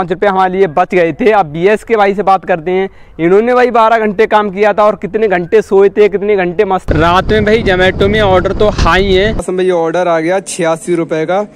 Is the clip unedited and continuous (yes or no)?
no